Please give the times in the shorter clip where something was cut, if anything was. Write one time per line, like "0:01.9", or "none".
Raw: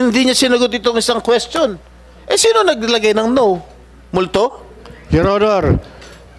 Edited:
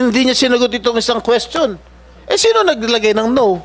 none